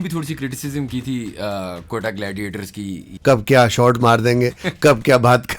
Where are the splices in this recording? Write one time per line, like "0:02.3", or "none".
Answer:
0:03.1